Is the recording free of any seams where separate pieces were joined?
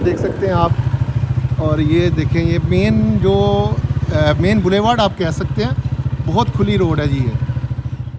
yes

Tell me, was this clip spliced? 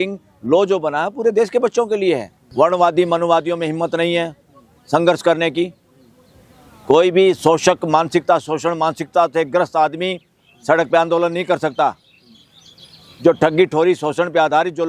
yes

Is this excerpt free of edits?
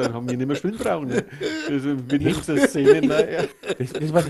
yes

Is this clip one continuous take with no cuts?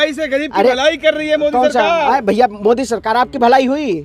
yes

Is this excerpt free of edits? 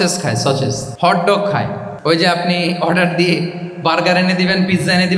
no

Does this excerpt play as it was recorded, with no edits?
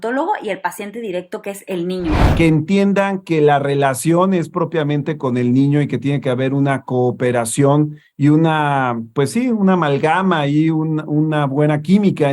no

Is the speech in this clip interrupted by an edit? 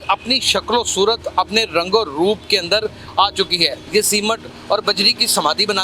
yes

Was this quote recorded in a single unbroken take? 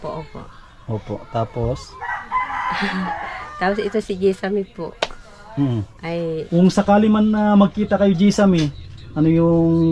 no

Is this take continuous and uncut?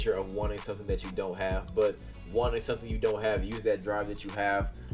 yes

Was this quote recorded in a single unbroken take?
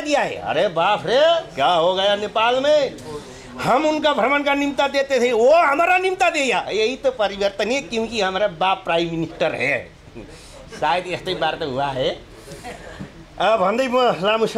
yes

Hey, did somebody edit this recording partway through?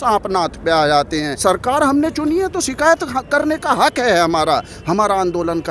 yes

